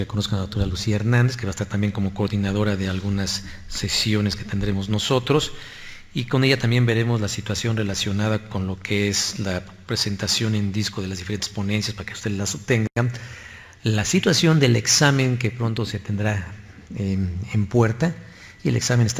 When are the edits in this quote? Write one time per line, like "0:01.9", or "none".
0:07.0